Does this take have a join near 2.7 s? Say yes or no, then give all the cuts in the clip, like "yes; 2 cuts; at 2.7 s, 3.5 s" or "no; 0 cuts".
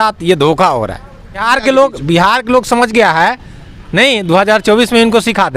no; 1 cut; at 1.4 s